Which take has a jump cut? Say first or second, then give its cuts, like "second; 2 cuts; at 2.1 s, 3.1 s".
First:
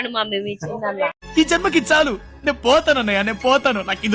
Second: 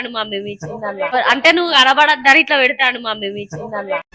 first; 1 cut; at 1.1 s